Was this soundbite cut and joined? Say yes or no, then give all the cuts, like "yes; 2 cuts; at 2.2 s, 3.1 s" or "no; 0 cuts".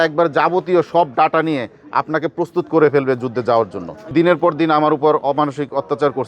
yes; 1 cut; at 4.1 s